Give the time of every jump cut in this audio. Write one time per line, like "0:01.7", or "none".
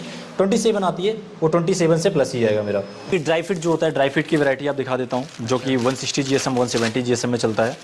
0:03.1